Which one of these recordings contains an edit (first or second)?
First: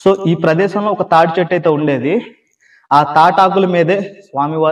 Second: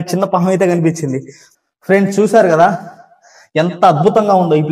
second